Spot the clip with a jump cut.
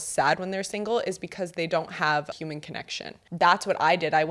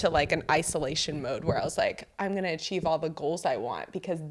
first; 1 cut; at 2.8 s

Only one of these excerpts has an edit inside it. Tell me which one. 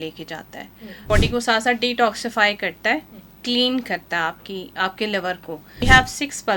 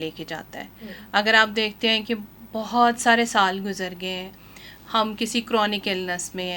first; 2 cuts; at 1.0 s, 5.8 s

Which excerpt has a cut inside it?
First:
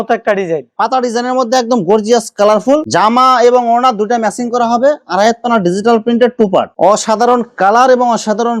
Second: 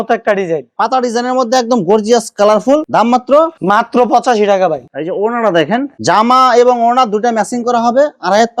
first; 2 cuts; at 2.9 s, 6.7 s

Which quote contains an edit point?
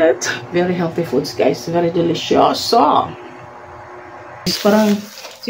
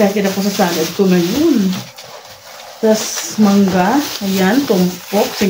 first; 1 cut; at 4.5 s

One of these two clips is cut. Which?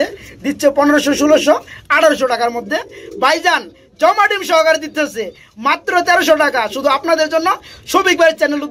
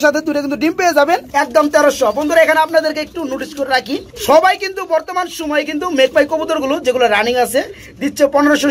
second; 2 cuts; at 1.3 s, 4.1 s

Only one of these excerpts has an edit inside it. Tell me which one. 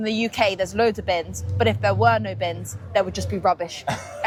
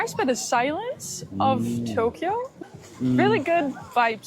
second; 1 cut; at 2.7 s

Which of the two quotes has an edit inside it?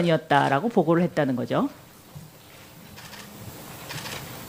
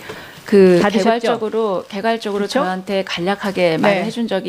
second; 1 cut; at 2.1 s

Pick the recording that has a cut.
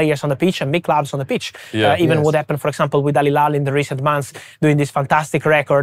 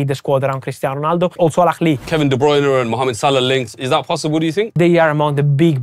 second; 3 cuts; at 1.3 s, 2.1 s, 4.8 s

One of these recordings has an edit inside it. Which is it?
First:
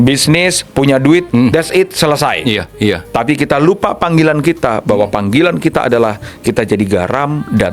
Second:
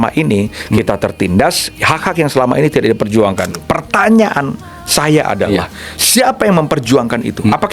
second; 1 cut; at 3.5 s

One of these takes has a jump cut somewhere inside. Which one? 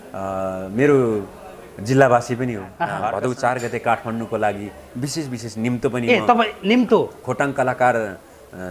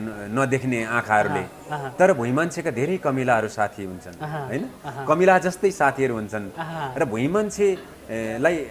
first; 1 cut; at 2.8 s

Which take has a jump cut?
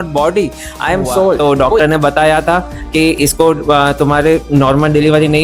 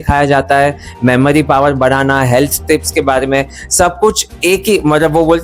first; 1 cut; at 1.4 s

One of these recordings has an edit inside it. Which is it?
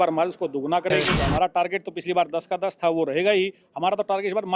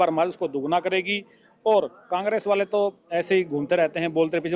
first; 1 cut; at 1.2 s

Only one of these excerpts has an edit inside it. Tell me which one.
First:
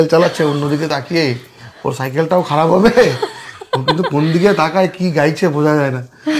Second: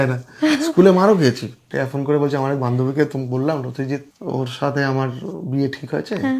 second; 2 cuts; at 1.8 s, 4.1 s

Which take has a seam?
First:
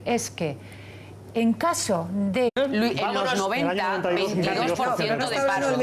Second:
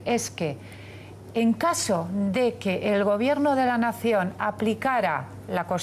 second; 1 cut; at 2.5 s

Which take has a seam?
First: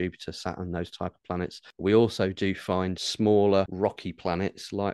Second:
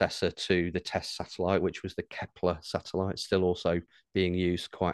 first; 3 cuts; at 1.6 s, 3.0 s, 3.7 s

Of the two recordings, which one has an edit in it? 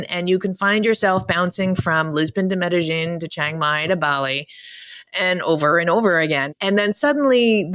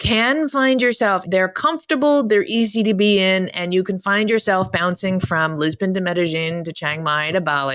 second; 1 cut; at 1.2 s

